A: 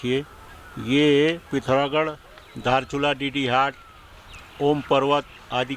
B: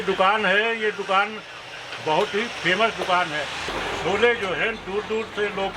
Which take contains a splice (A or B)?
B